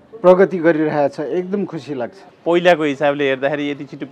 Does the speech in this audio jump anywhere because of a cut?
yes; 1 cut; at 2.2 s

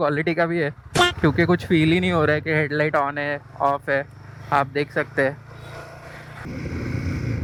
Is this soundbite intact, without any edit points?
yes; 0 cuts

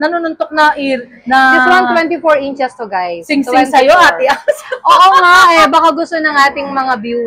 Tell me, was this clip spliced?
no; 0 cuts

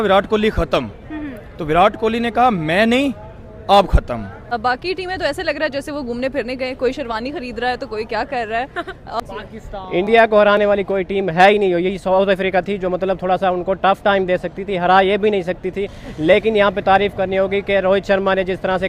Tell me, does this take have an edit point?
yes; 2 cuts; at 4.5 s, 9.2 s

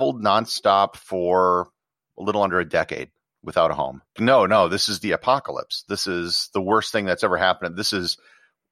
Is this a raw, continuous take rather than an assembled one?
no; 1 cut; at 4.2 s

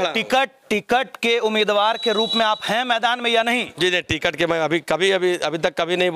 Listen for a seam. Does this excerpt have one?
no; 0 cuts

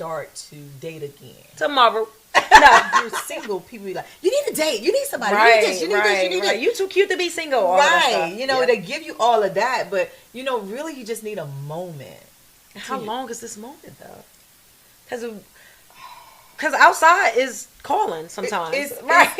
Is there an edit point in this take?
yes; 1 cut; at 3.2 s

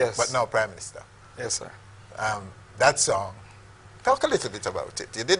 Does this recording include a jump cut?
no; 0 cuts

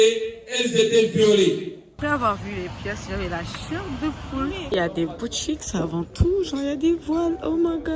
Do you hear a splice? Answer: yes; 2 cuts; at 2.0 s, 4.7 s

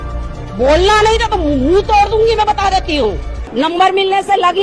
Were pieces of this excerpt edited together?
yes; 1 cut; at 3.4 s

